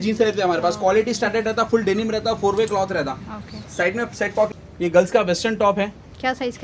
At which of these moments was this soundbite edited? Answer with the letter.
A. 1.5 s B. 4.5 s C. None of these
B